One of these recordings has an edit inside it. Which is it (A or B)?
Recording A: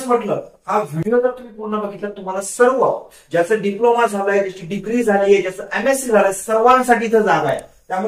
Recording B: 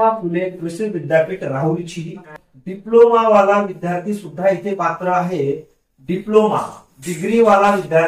B